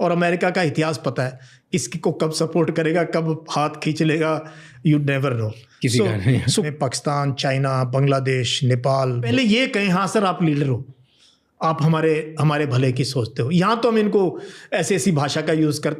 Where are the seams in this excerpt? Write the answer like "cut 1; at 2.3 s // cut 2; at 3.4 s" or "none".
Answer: cut 1; at 6.7 s // cut 2; at 9.3 s